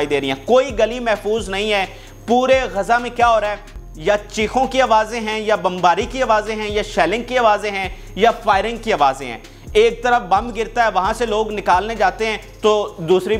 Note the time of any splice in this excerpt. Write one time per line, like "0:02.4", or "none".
none